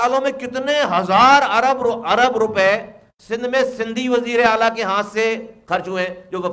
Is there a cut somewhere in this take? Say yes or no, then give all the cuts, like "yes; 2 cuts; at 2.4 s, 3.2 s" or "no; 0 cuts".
no; 0 cuts